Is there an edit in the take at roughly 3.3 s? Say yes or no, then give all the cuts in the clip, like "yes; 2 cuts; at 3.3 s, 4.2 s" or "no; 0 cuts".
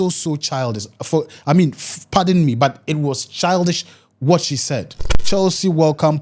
no; 1 cut; at 5.2 s